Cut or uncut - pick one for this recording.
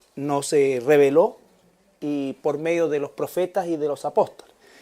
cut